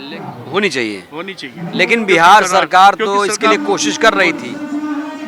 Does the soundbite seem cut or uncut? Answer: uncut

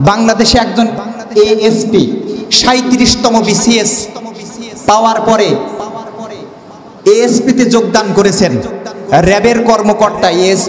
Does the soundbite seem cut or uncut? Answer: uncut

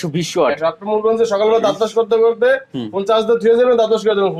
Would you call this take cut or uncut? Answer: uncut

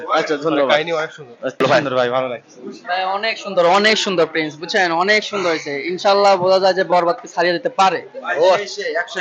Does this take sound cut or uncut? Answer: cut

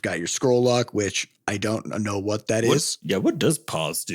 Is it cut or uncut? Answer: cut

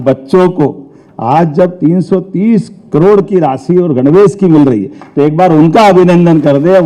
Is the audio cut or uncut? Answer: uncut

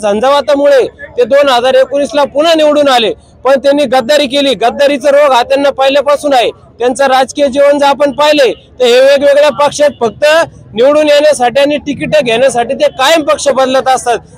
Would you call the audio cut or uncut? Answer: uncut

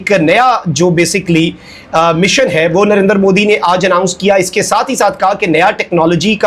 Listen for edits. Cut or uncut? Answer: uncut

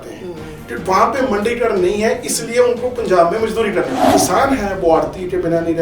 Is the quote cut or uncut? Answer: cut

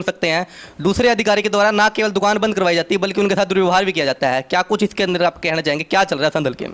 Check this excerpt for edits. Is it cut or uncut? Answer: uncut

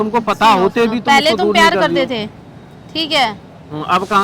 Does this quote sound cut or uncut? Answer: uncut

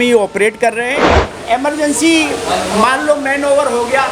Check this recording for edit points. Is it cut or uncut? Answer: cut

